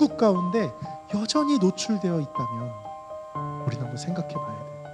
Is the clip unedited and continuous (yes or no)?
yes